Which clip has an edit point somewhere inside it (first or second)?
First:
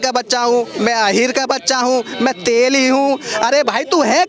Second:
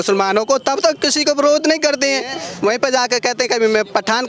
second